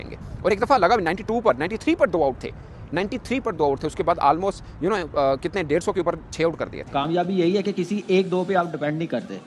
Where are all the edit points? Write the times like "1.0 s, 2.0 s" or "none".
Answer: 6.8 s

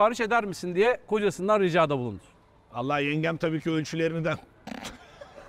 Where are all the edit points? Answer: none

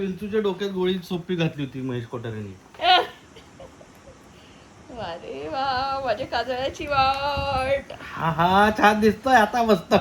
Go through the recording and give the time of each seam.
none

